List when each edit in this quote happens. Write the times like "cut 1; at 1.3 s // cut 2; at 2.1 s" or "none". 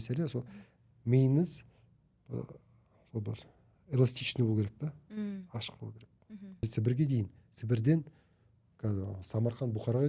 cut 1; at 6.6 s